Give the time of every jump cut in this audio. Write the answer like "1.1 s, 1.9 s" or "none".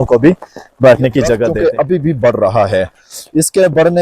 1.4 s